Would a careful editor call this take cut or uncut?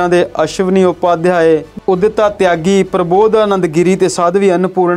cut